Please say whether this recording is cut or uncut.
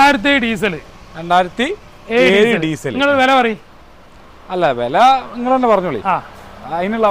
uncut